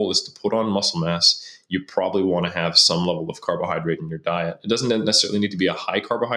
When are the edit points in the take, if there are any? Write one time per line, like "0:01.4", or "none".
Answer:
none